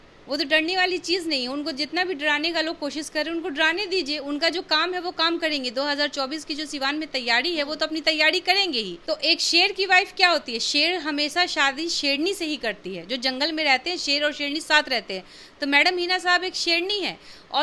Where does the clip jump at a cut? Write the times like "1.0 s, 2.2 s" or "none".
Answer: 8.9 s